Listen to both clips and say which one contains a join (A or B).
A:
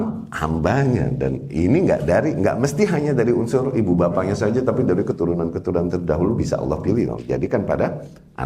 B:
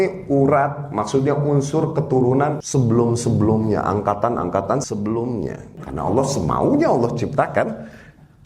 B